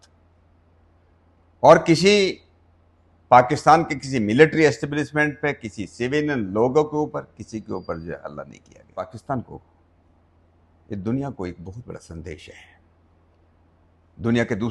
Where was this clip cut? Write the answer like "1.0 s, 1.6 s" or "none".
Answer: 9.2 s